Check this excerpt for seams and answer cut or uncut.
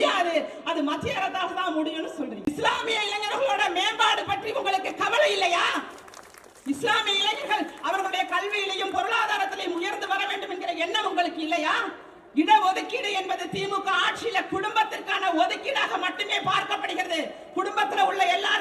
cut